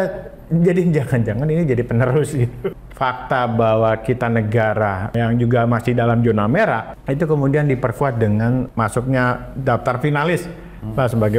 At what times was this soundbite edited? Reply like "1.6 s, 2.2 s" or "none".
2.6 s, 5.1 s, 6.9 s, 8.7 s